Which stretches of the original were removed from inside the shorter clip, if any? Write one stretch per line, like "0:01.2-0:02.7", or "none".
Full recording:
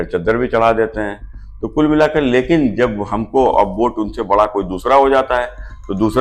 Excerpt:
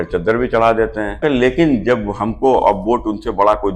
0:01.2-0:02.1